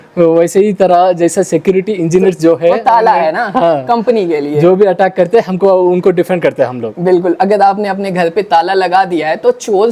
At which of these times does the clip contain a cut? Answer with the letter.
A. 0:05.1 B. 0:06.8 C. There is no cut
C